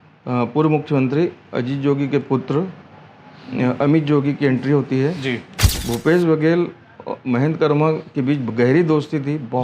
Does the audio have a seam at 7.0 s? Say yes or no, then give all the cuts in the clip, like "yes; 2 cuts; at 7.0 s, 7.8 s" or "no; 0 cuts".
no; 1 cut; at 5.6 s